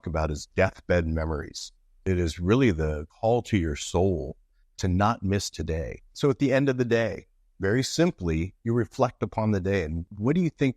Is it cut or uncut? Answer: cut